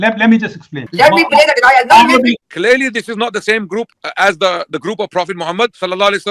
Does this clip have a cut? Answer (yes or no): yes